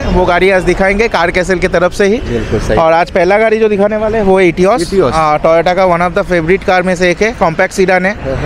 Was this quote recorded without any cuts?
yes; 0 cuts

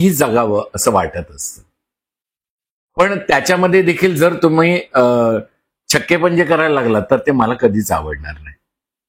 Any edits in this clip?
no; 0 cuts

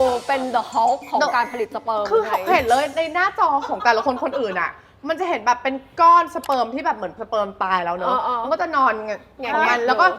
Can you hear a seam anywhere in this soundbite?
no; 0 cuts

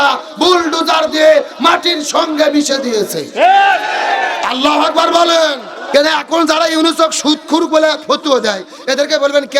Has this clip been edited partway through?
yes; 1 cut; at 5.8 s

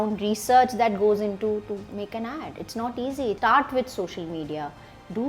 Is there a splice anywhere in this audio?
yes; 1 cut; at 3.4 s

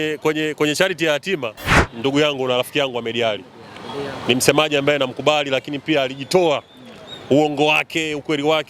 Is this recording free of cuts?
no; 1 cut; at 1.8 s

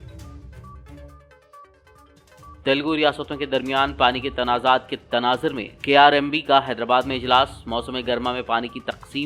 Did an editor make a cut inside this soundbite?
no; 0 cuts

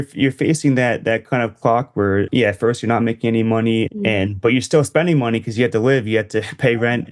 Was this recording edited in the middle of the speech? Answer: yes; 2 cuts; at 2.3 s, 3.9 s

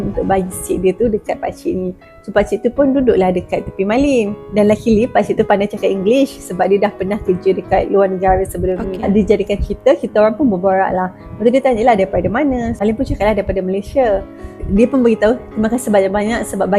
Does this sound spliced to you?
no; 0 cuts

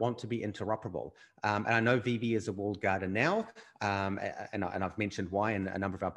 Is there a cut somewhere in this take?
no; 0 cuts

